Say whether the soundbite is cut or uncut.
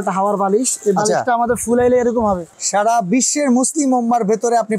cut